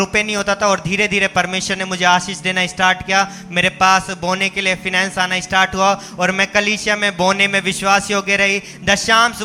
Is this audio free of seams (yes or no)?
yes